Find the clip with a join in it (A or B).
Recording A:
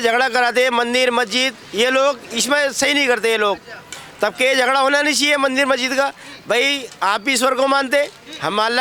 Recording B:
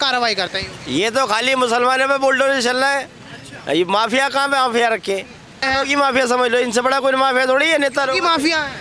B